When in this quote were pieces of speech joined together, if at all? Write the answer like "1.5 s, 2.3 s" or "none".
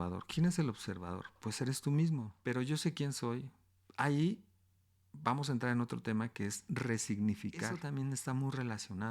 2.3 s, 7.8 s